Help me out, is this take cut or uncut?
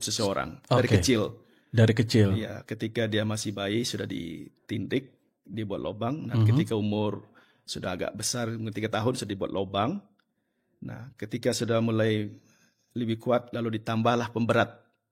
uncut